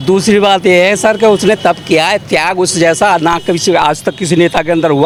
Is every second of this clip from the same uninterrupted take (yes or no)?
yes